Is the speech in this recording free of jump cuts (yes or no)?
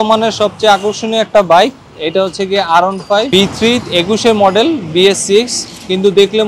no